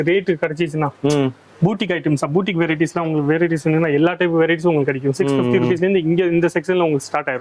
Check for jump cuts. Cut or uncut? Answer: uncut